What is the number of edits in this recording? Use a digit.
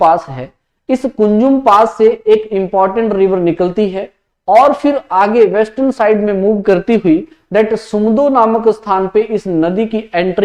0